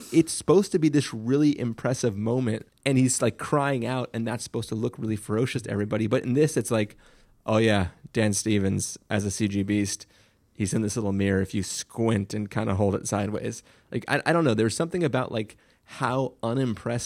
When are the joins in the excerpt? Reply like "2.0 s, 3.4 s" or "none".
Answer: 2.7 s